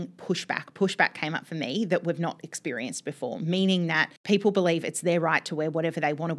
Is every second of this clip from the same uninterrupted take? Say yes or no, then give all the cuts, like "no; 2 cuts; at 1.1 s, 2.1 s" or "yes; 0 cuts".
no; 1 cut; at 4.1 s